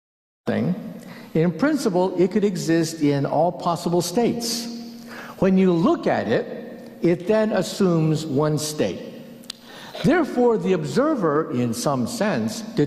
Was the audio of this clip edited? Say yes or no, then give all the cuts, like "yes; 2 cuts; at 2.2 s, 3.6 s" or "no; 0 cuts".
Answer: yes; 1 cut; at 10.6 s